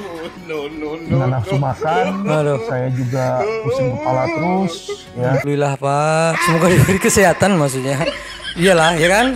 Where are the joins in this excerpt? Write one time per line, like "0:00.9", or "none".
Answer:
0:05.4